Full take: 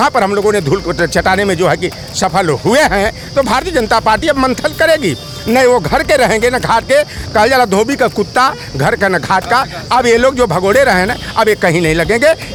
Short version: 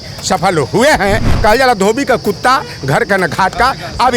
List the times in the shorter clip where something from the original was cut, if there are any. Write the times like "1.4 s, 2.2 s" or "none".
1.3 s